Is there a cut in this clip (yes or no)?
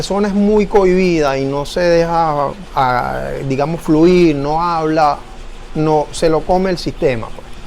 no